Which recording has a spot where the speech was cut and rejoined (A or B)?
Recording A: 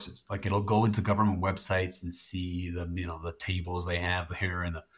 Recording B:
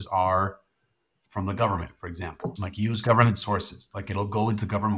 B